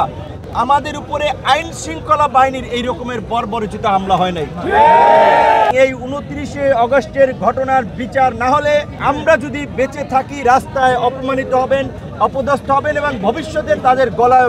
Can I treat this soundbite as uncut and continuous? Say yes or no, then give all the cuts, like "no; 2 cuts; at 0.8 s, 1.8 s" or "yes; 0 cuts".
no; 2 cuts; at 5.7 s, 8.9 s